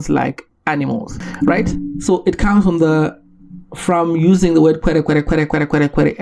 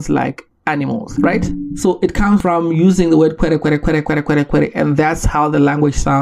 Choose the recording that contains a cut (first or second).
second